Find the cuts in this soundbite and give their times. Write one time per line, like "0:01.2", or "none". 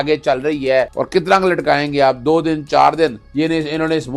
0:01.0
0:03.2

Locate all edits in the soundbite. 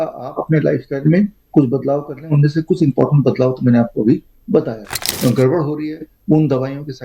0:05.1

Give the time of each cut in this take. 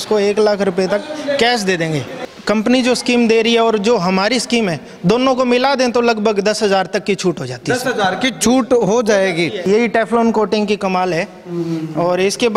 0:02.1
0:09.6

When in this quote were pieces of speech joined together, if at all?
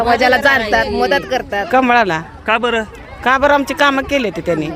0:01.6

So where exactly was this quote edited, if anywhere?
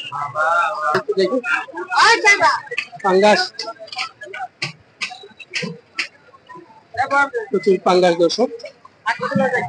0:00.9

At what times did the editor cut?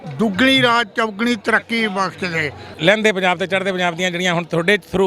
0:02.7

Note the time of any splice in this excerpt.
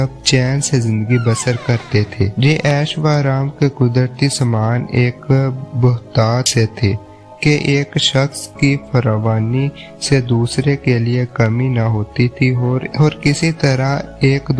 none

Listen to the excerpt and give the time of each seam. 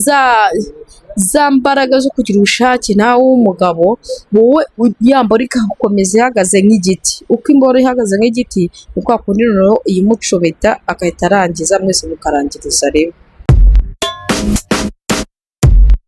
0:13.3

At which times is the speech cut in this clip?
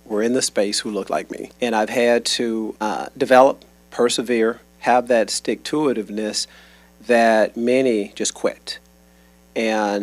0:01.4
0:02.7

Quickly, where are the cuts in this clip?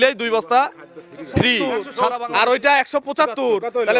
0:01.9

